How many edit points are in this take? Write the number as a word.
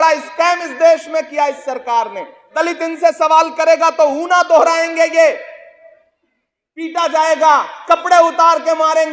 one